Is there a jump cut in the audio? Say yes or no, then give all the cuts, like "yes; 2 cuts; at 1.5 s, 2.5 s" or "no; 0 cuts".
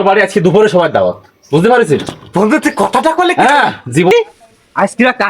yes; 1 cut; at 4.1 s